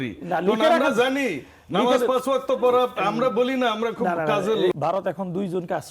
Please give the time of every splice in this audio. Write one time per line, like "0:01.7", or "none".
0:04.7